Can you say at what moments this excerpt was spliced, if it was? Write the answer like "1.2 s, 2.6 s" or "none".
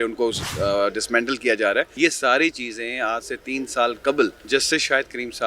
1.9 s, 4.4 s